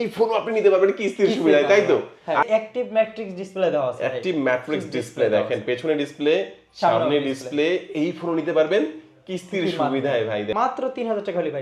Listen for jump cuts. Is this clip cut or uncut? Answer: cut